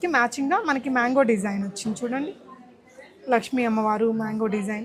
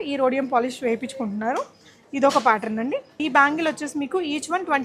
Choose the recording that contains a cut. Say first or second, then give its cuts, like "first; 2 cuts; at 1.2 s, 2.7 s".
second; 1 cut; at 3.2 s